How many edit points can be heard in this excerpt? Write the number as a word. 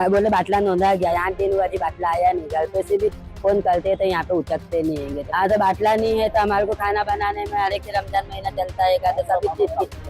one